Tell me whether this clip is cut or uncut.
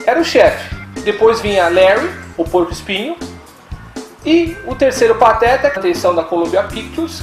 uncut